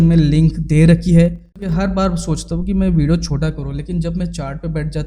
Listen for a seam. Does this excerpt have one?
yes; 1 cut; at 1.7 s

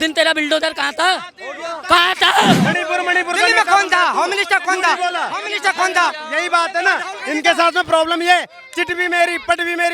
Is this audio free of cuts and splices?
no; 1 cut; at 2.6 s

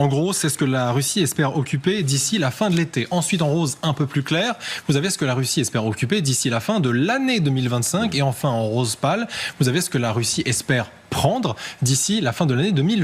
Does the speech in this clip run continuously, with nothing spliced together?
yes; 0 cuts

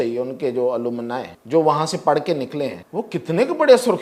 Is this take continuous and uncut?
no; 2 cuts; at 1.3 s, 2.8 s

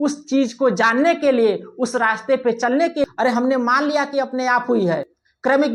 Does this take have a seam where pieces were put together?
yes; 1 cut; at 3.1 s

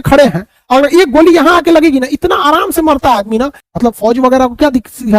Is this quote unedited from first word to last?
no; 1 cut; at 3.6 s

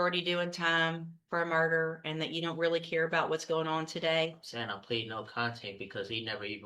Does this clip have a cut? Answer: no; 0 cuts

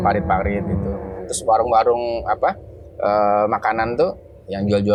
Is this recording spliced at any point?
no; 0 cuts

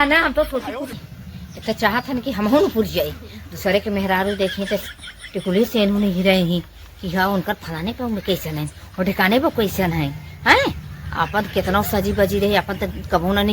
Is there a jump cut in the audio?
yes; 1 cut; at 1.0 s

